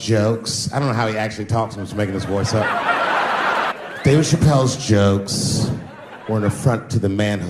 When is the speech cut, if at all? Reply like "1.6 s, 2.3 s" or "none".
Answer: 3.7 s